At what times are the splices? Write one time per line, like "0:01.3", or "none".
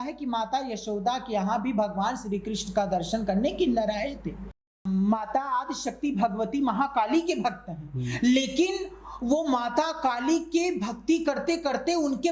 0:04.5